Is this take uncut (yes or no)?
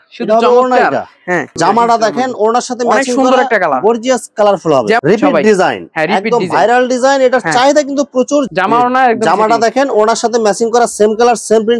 no